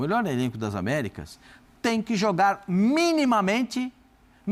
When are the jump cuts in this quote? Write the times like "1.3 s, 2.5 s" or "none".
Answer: none